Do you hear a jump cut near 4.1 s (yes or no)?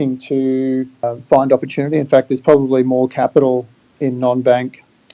no